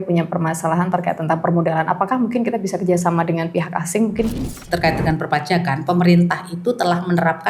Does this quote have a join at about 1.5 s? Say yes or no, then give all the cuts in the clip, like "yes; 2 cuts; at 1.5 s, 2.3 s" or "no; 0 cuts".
no; 1 cut; at 4.6 s